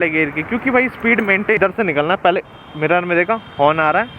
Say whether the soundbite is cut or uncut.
cut